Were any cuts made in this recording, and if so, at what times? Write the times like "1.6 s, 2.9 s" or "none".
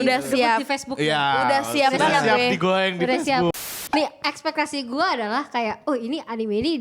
3.5 s